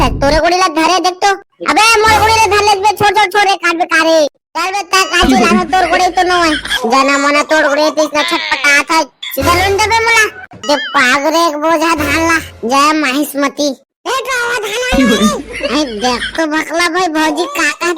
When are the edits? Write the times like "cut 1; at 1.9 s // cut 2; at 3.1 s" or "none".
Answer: cut 1; at 10.5 s